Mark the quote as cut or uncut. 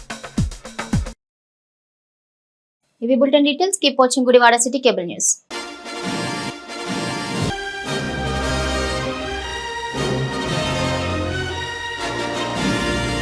uncut